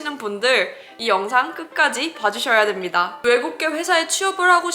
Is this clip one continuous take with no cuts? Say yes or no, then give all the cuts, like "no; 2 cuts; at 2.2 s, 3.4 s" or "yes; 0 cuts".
no; 2 cuts; at 0.9 s, 3.1 s